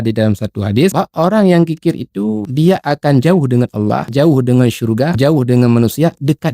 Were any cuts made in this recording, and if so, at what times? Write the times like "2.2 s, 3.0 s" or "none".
0.9 s, 2.4 s, 4.1 s, 5.1 s